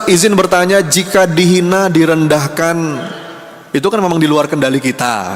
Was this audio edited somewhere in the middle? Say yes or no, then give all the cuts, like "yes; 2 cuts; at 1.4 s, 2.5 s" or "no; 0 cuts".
no; 0 cuts